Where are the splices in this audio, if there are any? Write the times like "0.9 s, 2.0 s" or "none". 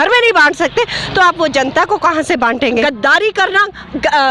2.8 s

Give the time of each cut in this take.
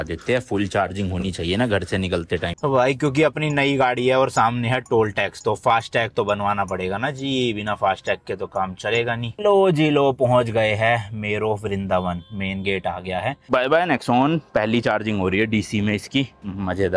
2.6 s, 9.3 s, 13.4 s

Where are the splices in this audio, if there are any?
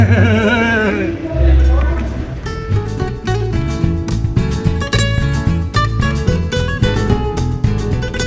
none

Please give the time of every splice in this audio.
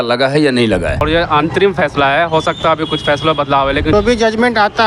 1.0 s, 3.9 s

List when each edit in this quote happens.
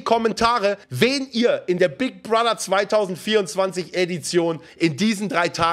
0.8 s, 4.7 s

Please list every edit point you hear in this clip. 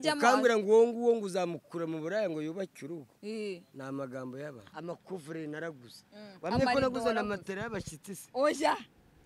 4.7 s

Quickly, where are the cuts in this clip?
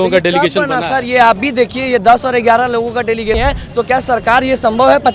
3.4 s

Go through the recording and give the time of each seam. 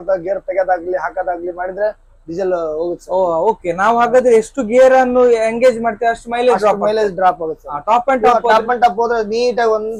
none

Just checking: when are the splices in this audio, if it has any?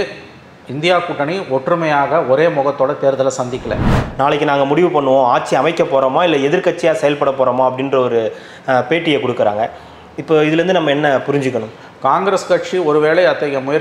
3.9 s

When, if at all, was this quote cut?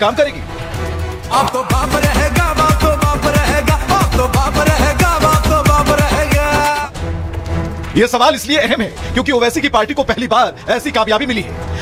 none

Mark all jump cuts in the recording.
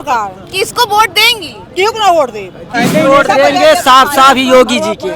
2.7 s

